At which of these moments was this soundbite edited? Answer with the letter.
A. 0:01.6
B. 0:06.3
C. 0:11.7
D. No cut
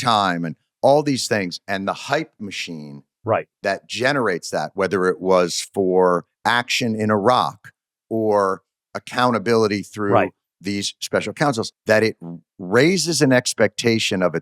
C